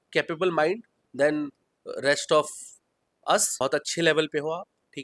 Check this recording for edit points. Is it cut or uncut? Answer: cut